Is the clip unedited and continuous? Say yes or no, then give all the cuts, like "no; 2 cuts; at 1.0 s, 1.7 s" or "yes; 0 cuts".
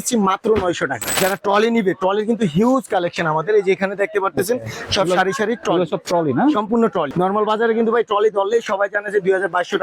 no; 2 cuts; at 1.2 s, 7.1 s